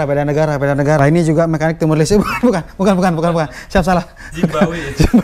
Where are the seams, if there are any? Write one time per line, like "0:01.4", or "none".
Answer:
0:01.0